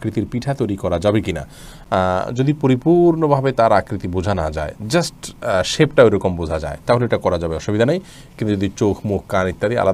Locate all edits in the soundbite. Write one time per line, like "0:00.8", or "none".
none